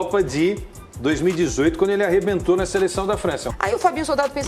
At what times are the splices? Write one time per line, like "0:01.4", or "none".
0:03.5